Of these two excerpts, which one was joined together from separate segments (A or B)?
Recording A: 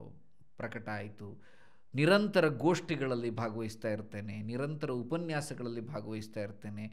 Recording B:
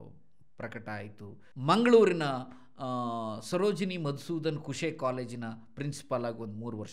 B